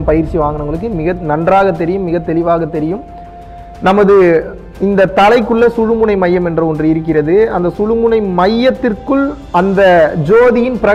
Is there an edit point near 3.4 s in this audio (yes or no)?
no